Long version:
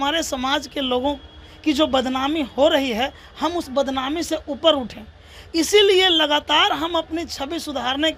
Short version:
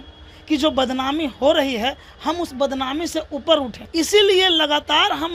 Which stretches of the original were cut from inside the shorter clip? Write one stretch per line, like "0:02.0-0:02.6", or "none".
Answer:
0:04.9-0:05.4